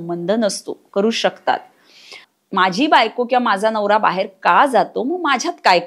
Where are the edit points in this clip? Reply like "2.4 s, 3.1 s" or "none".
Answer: 2.2 s